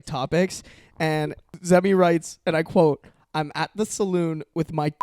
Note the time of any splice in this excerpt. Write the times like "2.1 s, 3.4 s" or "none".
1.4 s

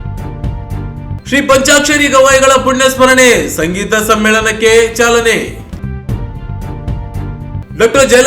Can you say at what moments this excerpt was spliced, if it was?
1.2 s

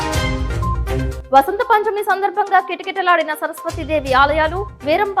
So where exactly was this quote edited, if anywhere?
1.1 s

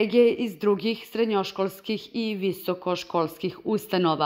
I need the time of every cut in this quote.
none

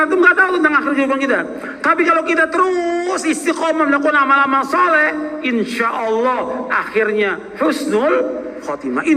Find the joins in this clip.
none

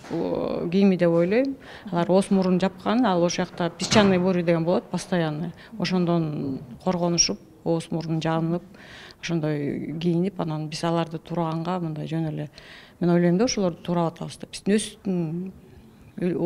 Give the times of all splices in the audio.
none

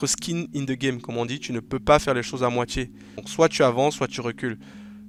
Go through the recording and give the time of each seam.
none

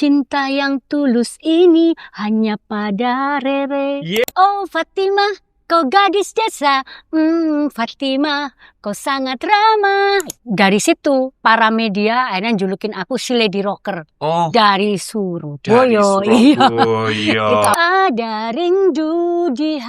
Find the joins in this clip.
4.2 s, 10.4 s, 11.3 s, 17.7 s

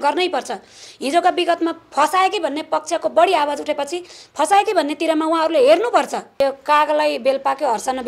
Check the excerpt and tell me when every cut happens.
6.4 s

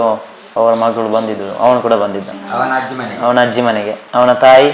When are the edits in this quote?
none

